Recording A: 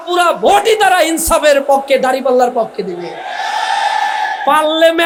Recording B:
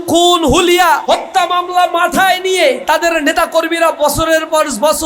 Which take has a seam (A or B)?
B